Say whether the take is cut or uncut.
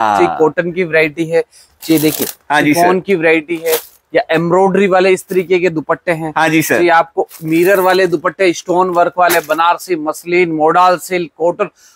uncut